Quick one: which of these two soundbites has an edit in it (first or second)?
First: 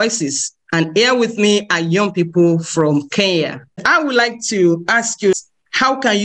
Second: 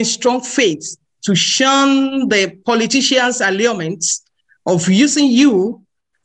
first